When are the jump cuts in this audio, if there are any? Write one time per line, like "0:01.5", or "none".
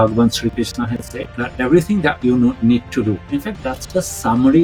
none